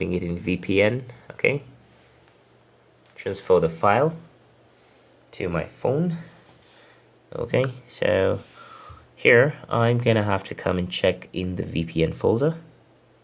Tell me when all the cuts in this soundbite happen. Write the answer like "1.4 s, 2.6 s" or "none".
none